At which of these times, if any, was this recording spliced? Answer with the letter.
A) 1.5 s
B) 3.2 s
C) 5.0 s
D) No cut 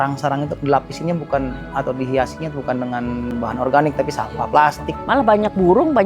C